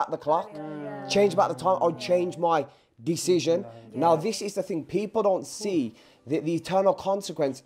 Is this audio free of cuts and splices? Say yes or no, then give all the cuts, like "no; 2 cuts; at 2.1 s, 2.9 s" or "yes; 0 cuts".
yes; 0 cuts